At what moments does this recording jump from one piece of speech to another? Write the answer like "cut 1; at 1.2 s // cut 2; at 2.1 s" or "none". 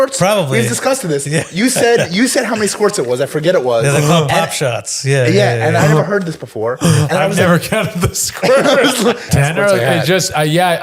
cut 1; at 9.2 s